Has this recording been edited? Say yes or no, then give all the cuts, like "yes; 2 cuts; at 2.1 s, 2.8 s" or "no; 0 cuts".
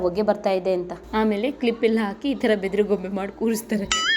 yes; 1 cut; at 1.0 s